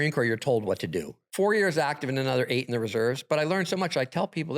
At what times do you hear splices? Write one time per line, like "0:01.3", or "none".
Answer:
0:01.2